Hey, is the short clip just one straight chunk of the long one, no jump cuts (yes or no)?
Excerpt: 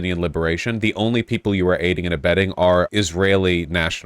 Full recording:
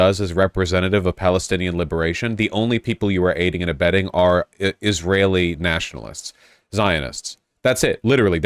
no